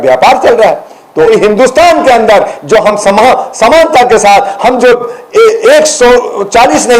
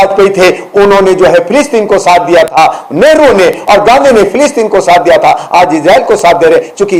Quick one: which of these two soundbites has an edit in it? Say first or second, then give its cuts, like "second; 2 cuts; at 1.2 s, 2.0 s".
first; 1 cut; at 1.2 s